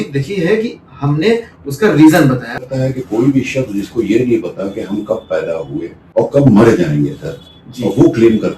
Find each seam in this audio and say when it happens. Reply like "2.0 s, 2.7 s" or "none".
2.6 s, 6.0 s